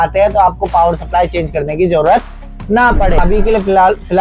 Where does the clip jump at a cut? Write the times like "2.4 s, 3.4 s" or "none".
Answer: 3.2 s